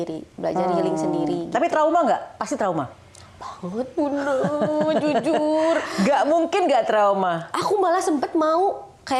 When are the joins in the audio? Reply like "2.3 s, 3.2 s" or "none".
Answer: none